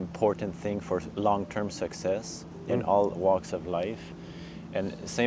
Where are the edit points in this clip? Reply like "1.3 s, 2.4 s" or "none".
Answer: none